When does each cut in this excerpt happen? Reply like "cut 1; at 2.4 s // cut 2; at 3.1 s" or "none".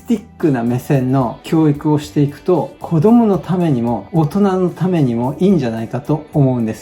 cut 1; at 1.4 s